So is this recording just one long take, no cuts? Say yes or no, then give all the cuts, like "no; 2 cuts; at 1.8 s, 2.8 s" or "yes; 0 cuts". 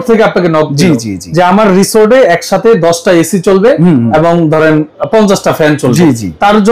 yes; 0 cuts